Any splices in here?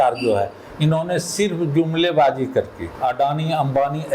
yes; 1 cut; at 2.8 s

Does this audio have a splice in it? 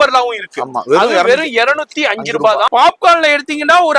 yes; 1 cut; at 2.7 s

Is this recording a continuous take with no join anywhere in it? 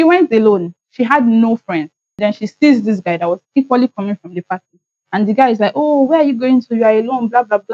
no; 1 cut; at 2.0 s

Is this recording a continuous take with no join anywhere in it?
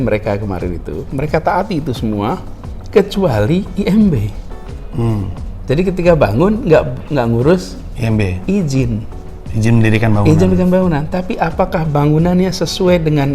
yes; 0 cuts

